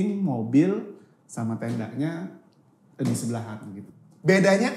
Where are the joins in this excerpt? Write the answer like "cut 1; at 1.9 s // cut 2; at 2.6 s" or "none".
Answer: cut 1; at 3.8 s